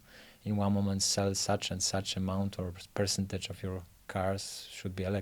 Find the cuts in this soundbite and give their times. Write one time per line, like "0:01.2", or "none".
none